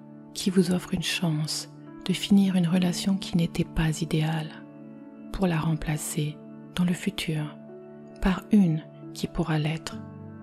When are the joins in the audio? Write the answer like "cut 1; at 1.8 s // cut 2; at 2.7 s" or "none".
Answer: none